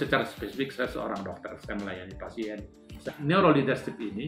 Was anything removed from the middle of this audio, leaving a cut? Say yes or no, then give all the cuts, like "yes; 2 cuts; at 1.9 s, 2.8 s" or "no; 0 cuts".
yes; 1 cut; at 3.1 s